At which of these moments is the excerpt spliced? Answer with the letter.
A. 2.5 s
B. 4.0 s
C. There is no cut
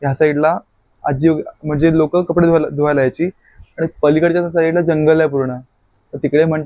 C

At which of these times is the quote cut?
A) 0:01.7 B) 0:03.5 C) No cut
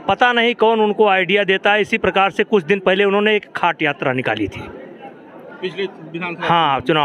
C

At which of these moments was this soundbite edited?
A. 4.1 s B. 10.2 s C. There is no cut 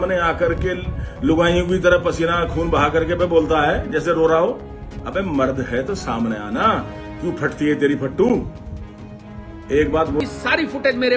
B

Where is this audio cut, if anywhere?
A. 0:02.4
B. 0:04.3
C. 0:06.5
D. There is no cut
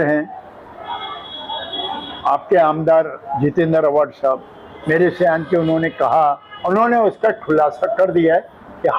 C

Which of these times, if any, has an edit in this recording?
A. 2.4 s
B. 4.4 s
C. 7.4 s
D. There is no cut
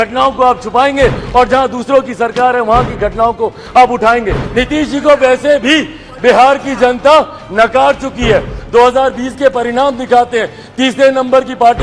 B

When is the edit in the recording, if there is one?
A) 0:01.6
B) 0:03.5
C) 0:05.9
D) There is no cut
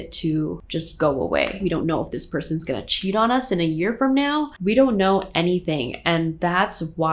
A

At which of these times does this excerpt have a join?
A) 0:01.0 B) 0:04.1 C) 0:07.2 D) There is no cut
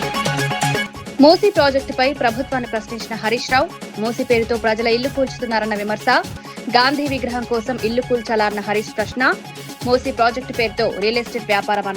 A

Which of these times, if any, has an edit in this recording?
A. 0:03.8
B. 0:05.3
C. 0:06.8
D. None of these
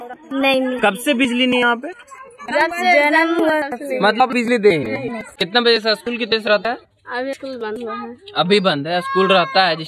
D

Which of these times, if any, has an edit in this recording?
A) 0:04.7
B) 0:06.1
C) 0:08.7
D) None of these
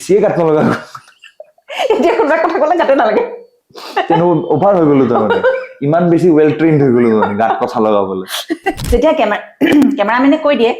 C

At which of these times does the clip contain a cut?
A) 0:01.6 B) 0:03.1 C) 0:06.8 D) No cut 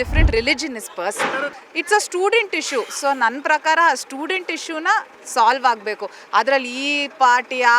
A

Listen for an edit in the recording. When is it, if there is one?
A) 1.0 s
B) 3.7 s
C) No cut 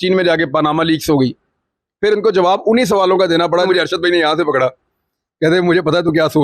B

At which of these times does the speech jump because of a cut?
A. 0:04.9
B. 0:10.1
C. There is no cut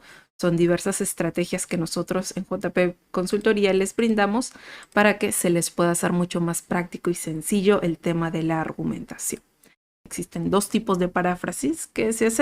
B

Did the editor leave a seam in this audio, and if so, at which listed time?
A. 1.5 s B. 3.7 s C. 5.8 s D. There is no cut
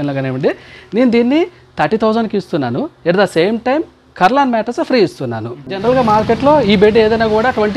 C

